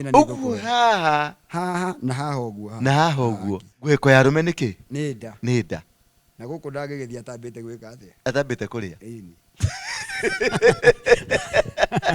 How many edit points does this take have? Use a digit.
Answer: 1